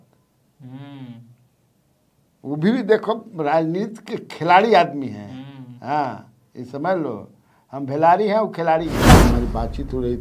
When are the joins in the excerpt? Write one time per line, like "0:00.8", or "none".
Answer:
0:09.1